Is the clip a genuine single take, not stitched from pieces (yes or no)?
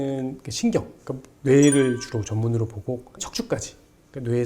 no